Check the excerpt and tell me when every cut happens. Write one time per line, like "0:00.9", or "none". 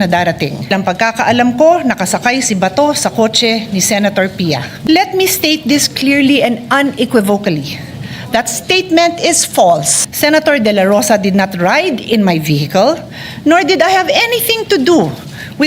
0:00.7
0:04.7
0:10.0